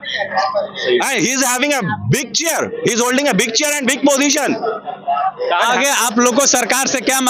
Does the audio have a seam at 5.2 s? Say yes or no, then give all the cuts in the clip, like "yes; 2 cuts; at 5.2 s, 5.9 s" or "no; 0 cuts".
no; 0 cuts